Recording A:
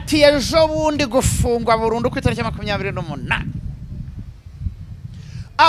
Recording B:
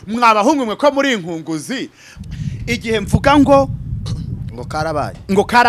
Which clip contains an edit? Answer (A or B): B